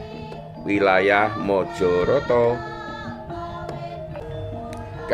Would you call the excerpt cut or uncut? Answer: cut